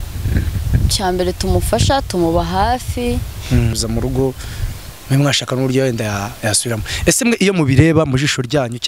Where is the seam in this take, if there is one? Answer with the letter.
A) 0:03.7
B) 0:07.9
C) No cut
A